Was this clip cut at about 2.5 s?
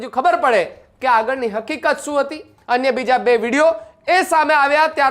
yes; 1 cut; at 2.5 s

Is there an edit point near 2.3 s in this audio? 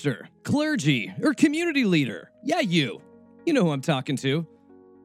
yes; 1 cut; at 2.3 s

